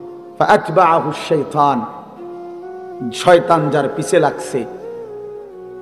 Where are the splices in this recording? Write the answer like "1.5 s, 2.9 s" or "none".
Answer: 1.9 s, 3.1 s